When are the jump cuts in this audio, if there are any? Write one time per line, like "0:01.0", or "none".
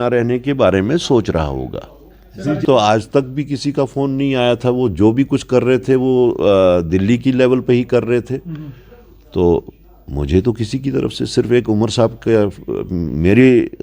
0:02.6

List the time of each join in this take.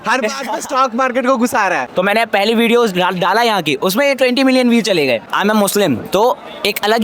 0:01.9
0:05.3

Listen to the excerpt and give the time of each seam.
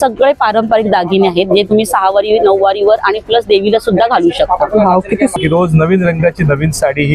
0:05.4

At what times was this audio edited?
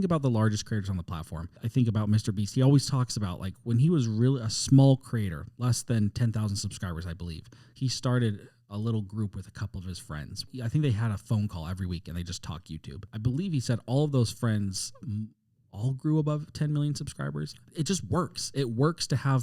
0:01.6
0:10.5
0:13.1

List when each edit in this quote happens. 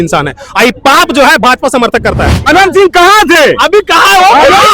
0:02.4

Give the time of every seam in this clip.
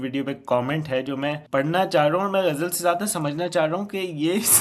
0:01.4

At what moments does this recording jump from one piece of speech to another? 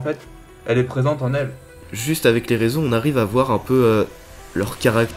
0:01.9

